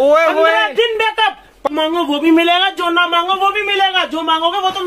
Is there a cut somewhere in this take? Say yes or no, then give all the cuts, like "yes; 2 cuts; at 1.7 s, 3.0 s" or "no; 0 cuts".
yes; 1 cut; at 1.7 s